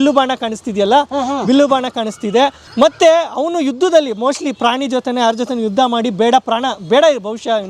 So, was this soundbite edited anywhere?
no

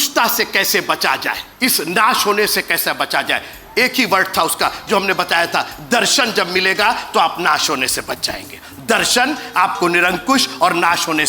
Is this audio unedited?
no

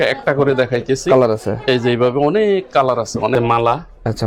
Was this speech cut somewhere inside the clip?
yes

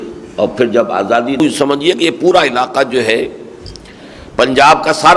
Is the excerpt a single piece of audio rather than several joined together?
no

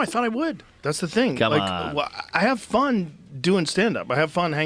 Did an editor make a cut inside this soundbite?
no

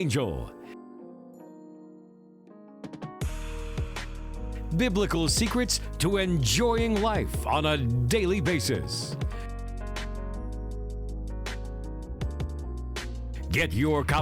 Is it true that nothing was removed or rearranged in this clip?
yes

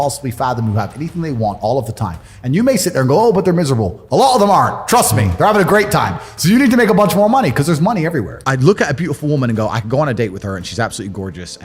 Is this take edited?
yes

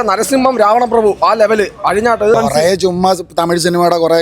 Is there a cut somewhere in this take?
yes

